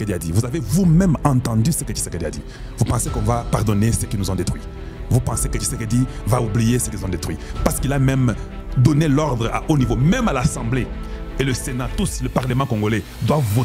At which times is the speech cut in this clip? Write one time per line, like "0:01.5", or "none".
none